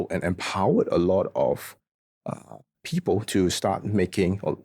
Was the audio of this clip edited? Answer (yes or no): no